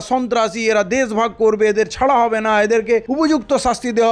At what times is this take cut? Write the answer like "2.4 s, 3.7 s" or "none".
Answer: 3.1 s